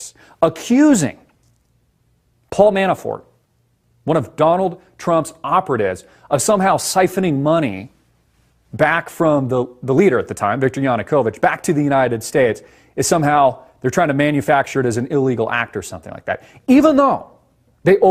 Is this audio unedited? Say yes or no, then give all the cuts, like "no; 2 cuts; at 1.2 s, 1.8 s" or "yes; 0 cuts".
yes; 0 cuts